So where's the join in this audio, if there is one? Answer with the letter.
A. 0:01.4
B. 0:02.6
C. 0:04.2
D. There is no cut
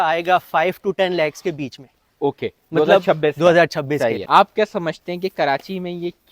C